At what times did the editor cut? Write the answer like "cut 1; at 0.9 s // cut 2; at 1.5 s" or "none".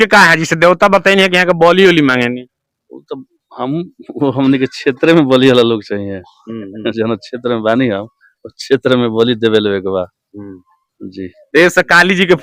none